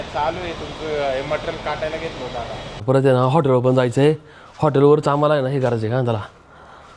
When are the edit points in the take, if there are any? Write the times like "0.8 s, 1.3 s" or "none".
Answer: 2.8 s